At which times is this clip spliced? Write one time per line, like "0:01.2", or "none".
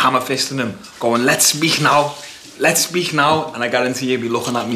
none